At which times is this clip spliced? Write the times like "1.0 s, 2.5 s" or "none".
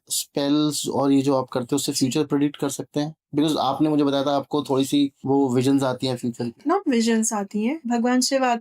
5.2 s, 6.6 s, 7.8 s